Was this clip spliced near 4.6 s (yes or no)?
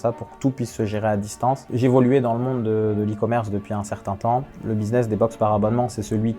no